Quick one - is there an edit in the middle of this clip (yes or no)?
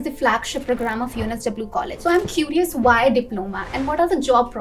yes